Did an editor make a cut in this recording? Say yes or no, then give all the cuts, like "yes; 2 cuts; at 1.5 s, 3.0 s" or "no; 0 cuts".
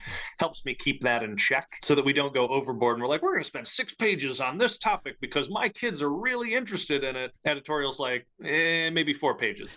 yes; 2 cuts; at 1.7 s, 7.3 s